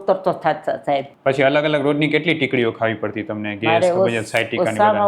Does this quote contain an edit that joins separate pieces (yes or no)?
yes